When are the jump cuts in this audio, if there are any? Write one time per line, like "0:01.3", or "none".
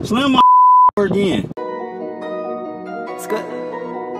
0:01.5

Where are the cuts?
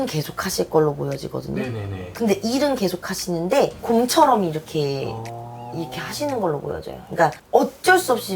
0:03.8
0:07.4

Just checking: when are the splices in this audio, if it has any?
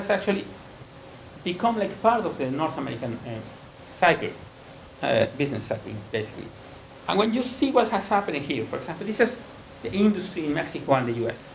0:09.5

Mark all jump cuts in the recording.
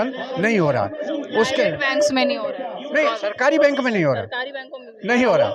none

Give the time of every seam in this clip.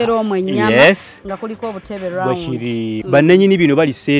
0:03.0

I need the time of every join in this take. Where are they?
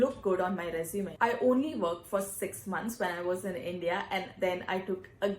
0:01.1

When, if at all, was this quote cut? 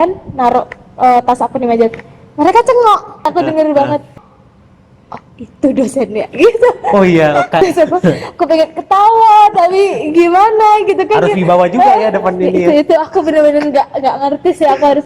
0:03.3
0:04.1
0:07.6

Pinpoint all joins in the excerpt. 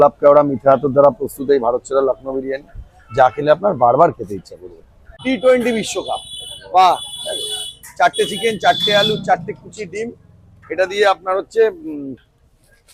0:05.1

